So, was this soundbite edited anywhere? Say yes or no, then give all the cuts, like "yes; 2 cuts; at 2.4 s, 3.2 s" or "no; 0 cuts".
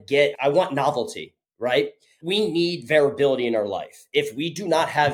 no; 0 cuts